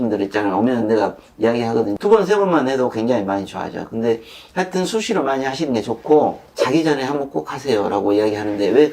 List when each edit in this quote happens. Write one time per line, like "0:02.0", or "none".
0:01.9
0:06.4